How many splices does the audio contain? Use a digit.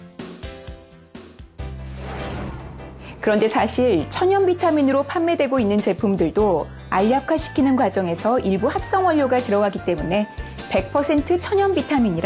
1